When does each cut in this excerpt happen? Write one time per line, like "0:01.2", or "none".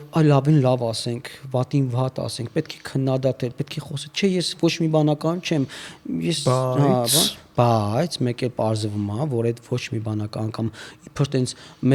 none